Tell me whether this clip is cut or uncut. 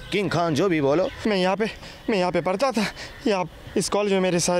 cut